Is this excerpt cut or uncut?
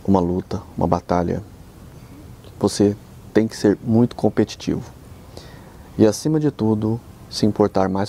uncut